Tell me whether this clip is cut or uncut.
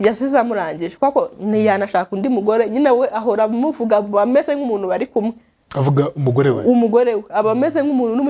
uncut